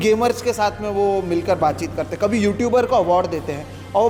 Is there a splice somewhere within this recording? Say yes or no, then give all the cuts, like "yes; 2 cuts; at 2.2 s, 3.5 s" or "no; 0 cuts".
no; 0 cuts